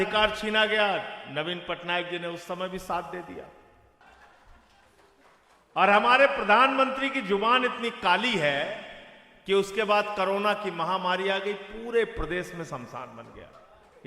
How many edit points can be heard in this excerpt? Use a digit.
1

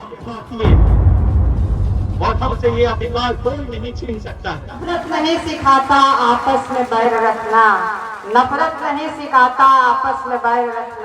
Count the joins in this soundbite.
1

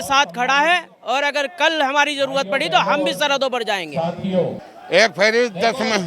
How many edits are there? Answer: 1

